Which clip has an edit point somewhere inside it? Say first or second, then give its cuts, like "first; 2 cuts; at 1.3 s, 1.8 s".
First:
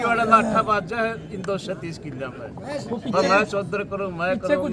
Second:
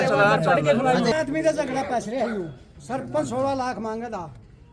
second; 1 cut; at 1.1 s